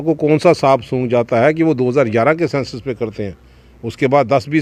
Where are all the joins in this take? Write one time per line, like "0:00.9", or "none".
none

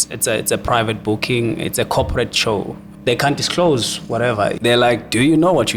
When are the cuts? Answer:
0:02.8
0:04.6

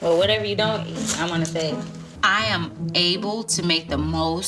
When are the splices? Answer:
0:02.0

